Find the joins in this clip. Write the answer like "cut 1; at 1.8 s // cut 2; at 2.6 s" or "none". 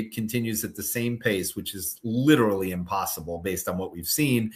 none